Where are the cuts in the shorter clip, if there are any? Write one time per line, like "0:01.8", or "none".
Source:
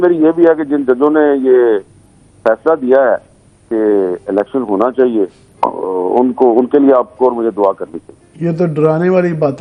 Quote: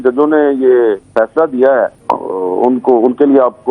0:01.0
0:02.0